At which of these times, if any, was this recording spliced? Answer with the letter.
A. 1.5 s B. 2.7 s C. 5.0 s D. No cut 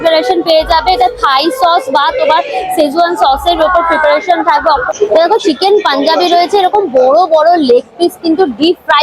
C